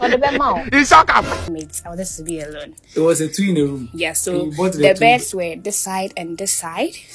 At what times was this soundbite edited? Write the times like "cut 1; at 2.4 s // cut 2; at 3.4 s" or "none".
cut 1; at 1.5 s